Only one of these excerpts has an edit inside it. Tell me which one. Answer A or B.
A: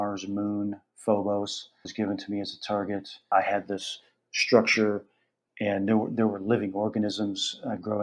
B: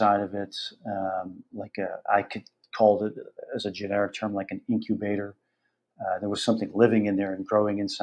A